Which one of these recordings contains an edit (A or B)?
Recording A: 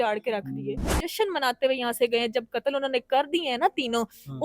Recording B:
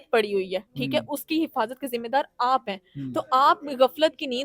A